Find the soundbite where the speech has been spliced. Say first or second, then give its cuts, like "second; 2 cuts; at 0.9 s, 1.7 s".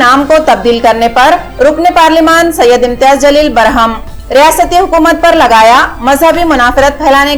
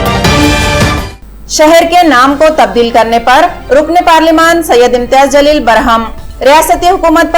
second; 1 cut; at 1.2 s